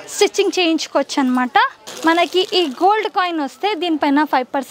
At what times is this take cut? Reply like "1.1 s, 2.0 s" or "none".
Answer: 1.8 s